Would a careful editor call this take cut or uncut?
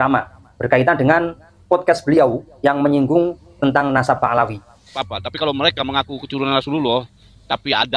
cut